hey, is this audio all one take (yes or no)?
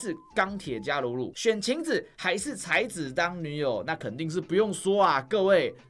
no